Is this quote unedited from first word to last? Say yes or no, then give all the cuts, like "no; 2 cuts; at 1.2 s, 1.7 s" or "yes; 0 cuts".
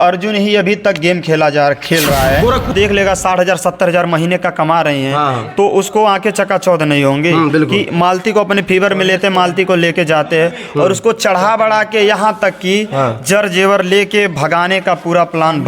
no; 1 cut; at 2.7 s